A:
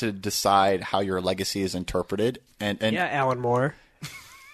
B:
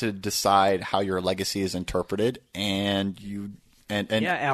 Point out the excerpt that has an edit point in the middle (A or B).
A